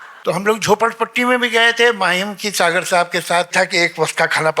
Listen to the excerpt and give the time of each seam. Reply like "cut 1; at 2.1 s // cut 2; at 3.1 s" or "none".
cut 1; at 3.5 s